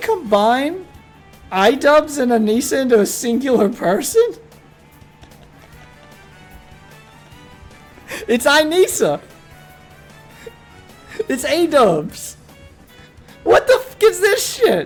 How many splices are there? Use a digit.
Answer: 0